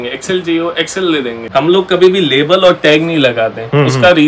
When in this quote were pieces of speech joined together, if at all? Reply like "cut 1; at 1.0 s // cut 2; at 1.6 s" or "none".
cut 1; at 1.5 s